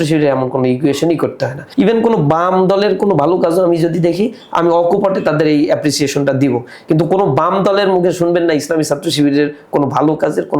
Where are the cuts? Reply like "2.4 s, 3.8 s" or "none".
1.6 s